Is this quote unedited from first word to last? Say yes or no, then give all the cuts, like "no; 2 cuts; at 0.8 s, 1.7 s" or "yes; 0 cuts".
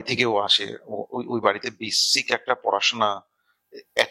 yes; 0 cuts